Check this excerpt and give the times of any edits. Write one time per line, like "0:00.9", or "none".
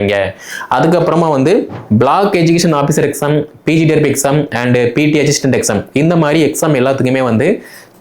0:01.8